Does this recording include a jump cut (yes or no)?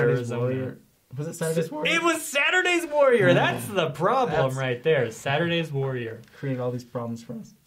yes